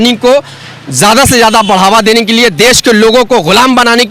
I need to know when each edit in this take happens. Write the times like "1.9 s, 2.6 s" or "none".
none